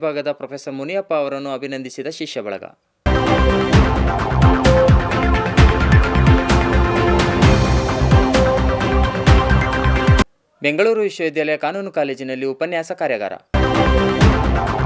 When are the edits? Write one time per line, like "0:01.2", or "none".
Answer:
0:03.1
0:10.3
0:13.5